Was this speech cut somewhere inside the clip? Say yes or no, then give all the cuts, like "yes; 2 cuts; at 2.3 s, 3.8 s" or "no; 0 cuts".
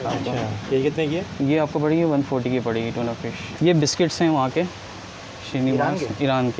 yes; 1 cut; at 3.5 s